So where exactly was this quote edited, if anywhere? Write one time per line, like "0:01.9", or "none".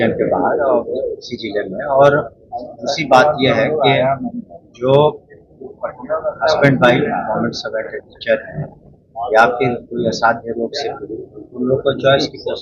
none